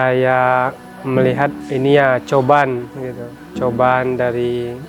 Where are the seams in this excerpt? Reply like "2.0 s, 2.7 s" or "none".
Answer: 0.9 s, 1.6 s